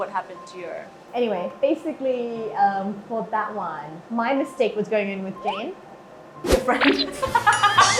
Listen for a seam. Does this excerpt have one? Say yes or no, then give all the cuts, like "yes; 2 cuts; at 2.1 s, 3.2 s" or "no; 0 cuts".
no; 0 cuts